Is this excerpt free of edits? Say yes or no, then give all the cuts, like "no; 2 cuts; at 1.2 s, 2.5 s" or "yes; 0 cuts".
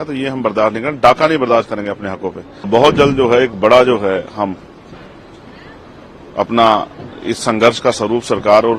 no; 1 cut; at 2.7 s